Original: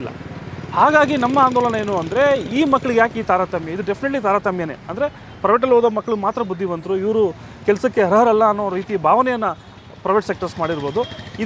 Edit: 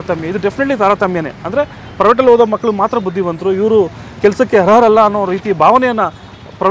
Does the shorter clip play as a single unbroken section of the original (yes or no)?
yes